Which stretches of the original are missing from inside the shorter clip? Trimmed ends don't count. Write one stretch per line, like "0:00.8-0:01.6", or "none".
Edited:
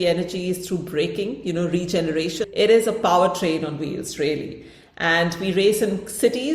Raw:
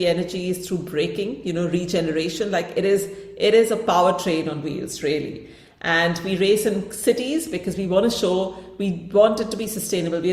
0:02.4-0:03.3